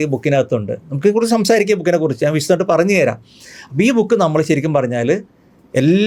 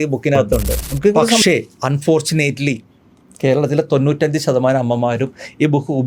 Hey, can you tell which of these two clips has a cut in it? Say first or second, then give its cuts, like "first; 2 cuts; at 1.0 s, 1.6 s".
second; 1 cut; at 1.4 s